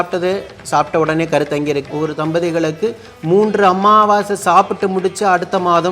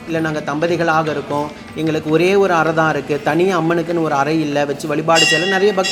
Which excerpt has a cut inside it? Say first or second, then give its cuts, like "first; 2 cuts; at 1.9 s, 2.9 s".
first; 1 cut; at 1.8 s